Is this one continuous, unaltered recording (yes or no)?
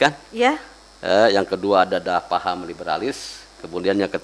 yes